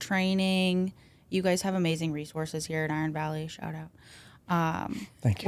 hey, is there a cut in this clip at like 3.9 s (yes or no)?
no